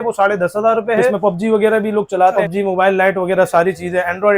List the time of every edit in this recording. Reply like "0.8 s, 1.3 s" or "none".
1.2 s, 2.4 s